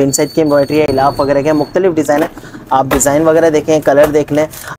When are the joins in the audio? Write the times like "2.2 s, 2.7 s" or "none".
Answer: none